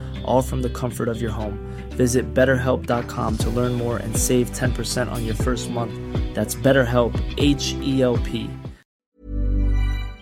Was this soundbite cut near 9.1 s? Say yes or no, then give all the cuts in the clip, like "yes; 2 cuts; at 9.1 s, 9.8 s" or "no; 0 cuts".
yes; 1 cut; at 9.1 s